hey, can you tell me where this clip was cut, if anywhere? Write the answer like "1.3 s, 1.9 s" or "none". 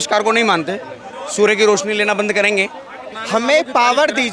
3.1 s

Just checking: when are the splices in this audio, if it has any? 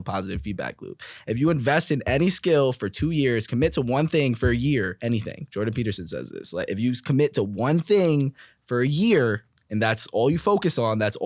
4.9 s

